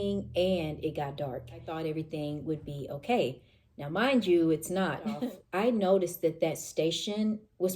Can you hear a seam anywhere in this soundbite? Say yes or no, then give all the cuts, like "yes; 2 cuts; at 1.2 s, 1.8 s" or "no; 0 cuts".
yes; 2 cuts; at 1.7 s, 5.3 s